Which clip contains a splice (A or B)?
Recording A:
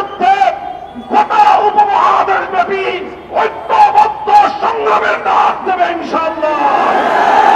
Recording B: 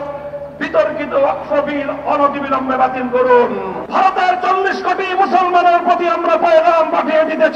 B